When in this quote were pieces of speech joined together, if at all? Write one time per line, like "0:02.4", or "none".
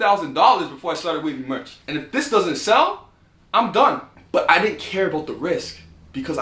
0:01.7
0:04.1